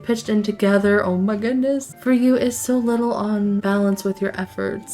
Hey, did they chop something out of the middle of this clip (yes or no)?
yes